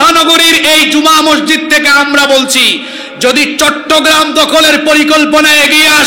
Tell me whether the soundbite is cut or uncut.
uncut